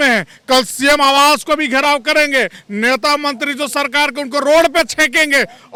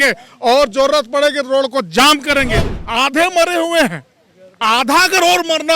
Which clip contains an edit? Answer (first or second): second